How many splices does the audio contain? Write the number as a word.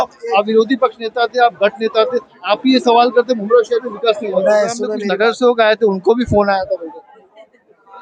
one